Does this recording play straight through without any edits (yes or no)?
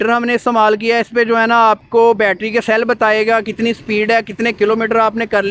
yes